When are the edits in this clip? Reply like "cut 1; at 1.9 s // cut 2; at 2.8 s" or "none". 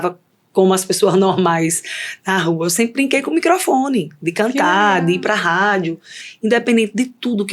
cut 1; at 6.2 s